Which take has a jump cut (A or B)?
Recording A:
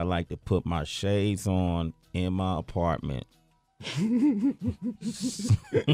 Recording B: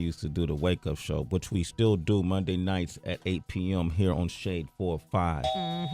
B